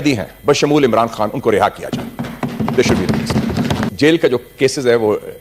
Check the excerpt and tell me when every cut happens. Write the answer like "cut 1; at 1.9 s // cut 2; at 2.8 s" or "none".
cut 1; at 3.9 s